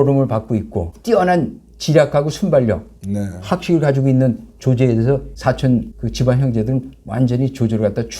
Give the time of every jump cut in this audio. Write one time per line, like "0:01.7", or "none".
0:00.9
0:05.3
0:06.0